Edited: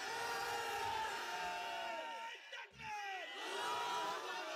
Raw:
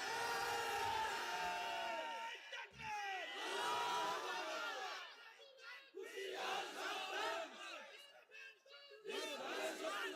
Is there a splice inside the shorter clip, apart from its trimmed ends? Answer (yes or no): no